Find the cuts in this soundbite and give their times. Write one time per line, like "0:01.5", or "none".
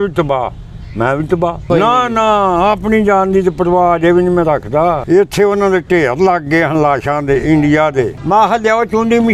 0:01.7
0:05.0
0:08.2